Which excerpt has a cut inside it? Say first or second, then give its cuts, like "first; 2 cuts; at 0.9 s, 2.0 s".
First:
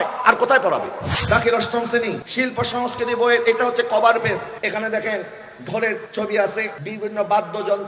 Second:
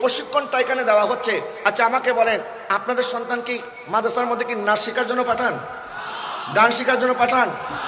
first; 5 cuts; at 1.1 s, 2.2 s, 4.5 s, 6.1 s, 6.8 s